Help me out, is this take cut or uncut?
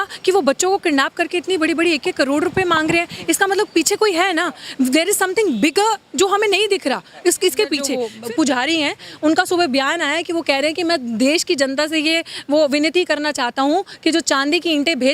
cut